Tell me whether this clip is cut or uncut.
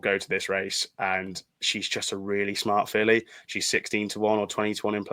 uncut